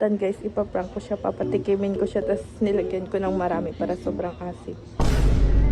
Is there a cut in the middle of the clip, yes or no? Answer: yes